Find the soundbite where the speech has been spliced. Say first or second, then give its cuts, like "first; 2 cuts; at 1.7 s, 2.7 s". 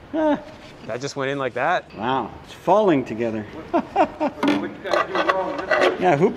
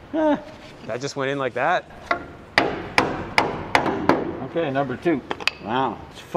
first; 2 cuts; at 1.9 s, 3.5 s